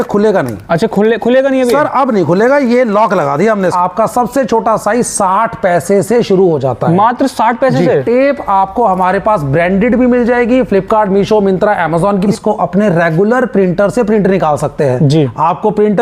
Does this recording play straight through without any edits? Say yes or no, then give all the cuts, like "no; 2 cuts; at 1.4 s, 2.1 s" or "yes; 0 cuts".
no; 3 cuts; at 3.7 s, 8.0 s, 12.3 s